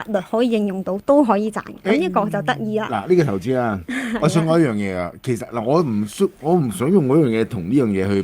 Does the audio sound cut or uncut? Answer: uncut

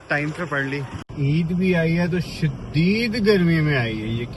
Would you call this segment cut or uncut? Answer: cut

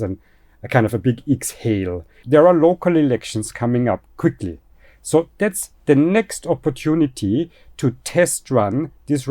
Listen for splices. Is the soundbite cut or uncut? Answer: cut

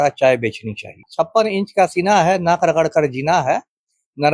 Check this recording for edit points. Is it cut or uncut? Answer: cut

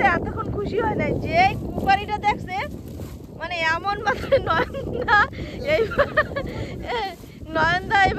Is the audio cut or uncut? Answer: uncut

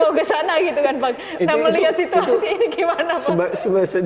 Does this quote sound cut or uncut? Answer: uncut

